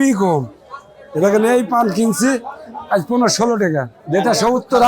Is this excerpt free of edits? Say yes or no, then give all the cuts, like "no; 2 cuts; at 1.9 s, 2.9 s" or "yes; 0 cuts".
no; 1 cut; at 4.0 s